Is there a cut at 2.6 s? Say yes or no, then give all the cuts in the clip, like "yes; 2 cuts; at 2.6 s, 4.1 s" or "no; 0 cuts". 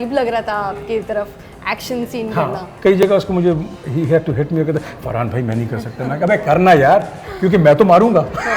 yes; 1 cut; at 2.6 s